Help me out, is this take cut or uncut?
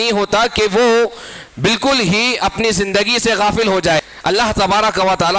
cut